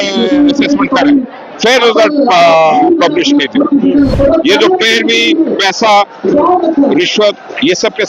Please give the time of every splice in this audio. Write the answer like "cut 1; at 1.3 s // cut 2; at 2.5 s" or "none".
cut 1; at 4.1 s